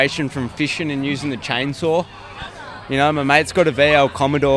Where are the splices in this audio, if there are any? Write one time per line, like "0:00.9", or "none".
none